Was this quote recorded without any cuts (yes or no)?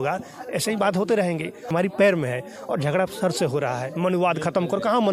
no